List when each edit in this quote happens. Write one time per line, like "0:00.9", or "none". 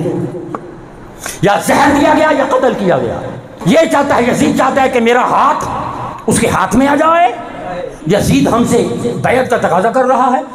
0:03.5
0:07.9